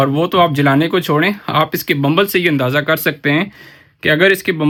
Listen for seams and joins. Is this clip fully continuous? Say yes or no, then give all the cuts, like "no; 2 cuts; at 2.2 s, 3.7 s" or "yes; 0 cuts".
yes; 0 cuts